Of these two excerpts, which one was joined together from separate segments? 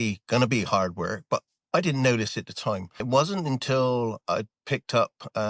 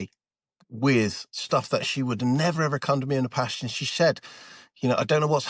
first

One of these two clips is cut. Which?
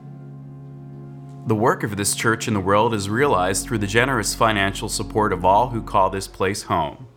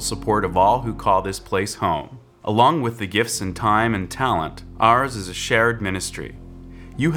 first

